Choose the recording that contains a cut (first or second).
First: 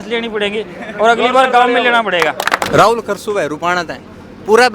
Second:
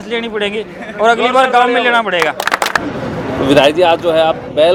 first